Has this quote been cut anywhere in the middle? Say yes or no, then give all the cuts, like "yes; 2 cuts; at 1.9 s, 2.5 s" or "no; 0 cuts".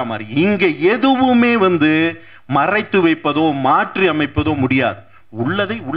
no; 0 cuts